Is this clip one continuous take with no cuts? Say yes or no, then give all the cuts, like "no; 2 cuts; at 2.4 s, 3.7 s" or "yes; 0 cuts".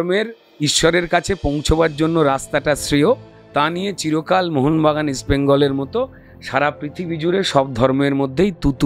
yes; 0 cuts